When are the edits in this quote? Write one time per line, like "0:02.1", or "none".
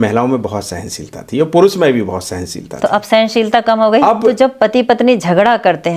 0:04.3